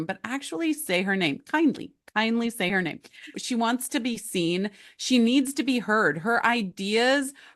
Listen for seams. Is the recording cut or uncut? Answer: cut